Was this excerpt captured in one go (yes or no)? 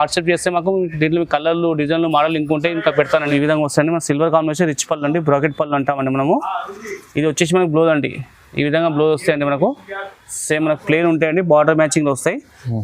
no